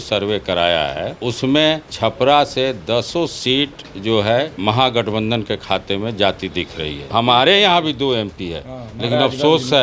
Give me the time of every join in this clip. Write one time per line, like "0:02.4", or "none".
0:01.1
0:01.9
0:04.5
0:07.0